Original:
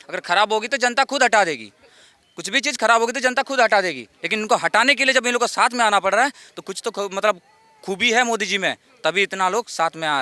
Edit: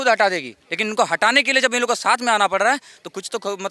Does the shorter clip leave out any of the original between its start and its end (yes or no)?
no